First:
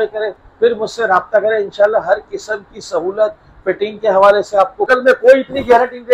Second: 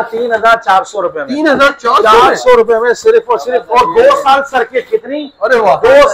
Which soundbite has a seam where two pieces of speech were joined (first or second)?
first